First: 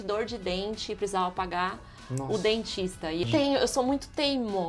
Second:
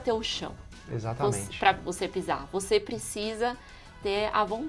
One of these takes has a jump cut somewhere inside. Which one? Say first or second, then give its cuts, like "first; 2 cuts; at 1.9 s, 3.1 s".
first; 1 cut; at 3.2 s